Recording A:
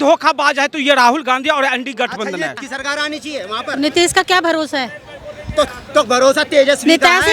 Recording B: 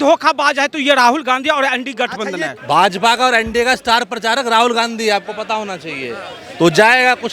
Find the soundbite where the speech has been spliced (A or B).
B